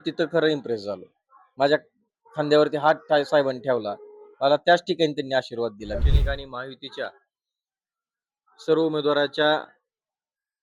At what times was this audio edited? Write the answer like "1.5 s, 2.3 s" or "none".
6.0 s